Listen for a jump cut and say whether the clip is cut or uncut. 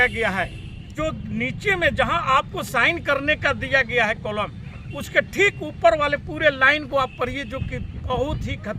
cut